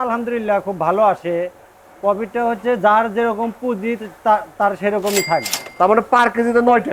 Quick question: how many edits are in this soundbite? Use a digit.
1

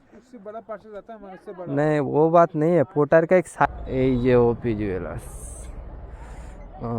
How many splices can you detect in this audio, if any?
1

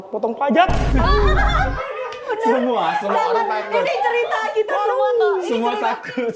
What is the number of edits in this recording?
0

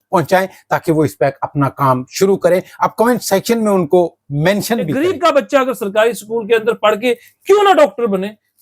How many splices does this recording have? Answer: 1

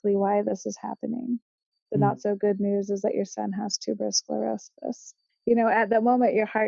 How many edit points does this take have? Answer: 1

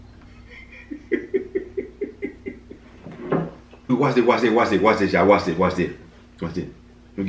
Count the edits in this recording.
1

